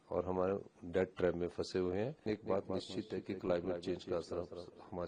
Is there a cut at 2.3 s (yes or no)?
yes